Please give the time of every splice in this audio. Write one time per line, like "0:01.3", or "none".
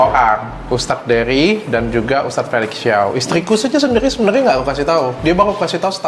none